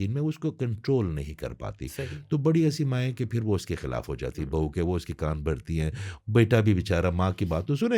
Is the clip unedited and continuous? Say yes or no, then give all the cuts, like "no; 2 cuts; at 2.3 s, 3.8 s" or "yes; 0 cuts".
yes; 0 cuts